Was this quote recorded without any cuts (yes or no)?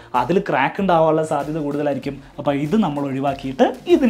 yes